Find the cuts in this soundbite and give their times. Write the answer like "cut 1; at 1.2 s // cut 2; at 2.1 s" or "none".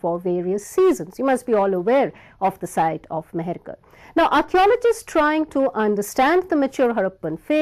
cut 1; at 4.8 s